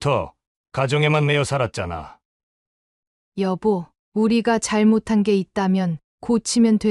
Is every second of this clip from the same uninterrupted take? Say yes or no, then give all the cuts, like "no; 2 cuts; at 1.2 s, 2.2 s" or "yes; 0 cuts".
no; 1 cut; at 2.2 s